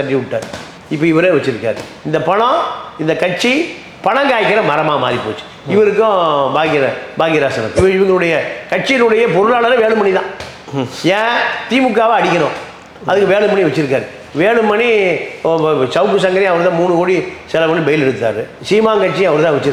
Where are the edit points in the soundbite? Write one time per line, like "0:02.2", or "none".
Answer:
0:07.8

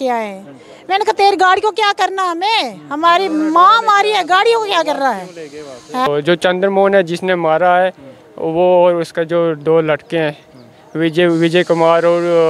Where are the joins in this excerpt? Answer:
0:06.1

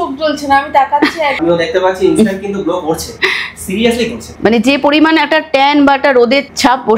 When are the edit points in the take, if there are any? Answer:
0:01.4
0:04.3

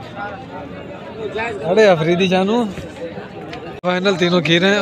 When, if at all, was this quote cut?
0:03.8

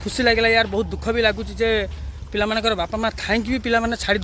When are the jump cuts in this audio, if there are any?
none

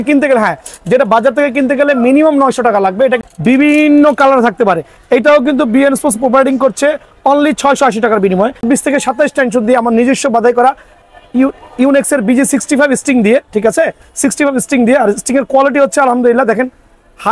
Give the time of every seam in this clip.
0:03.2
0:08.6

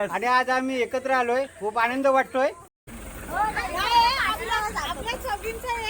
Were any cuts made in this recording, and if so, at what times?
0:02.7

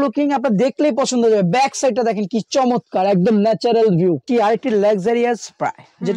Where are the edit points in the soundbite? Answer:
0:04.2

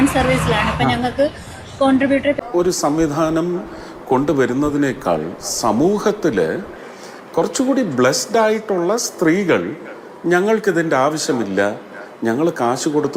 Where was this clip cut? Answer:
0:02.4

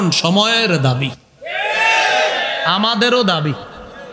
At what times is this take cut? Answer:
none

